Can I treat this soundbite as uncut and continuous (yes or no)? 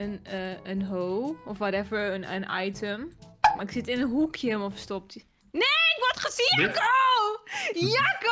yes